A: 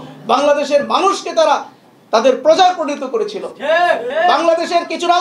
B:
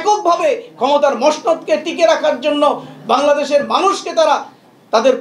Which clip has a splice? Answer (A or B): A